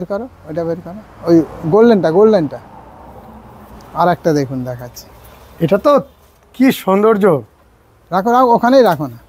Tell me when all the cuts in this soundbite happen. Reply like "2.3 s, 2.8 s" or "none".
none

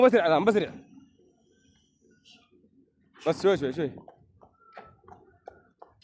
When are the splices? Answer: 1.3 s

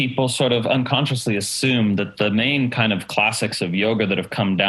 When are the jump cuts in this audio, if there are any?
none

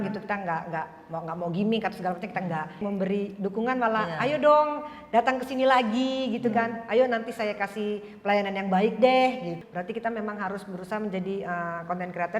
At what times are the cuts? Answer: 2.8 s, 9.6 s

